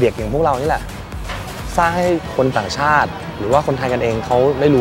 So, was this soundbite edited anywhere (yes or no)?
no